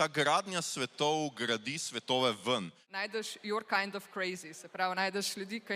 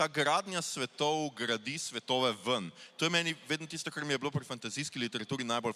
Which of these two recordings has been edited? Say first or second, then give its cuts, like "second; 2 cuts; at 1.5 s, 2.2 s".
first; 1 cut; at 2.9 s